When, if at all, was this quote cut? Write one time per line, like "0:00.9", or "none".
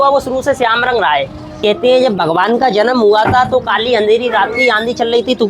0:01.4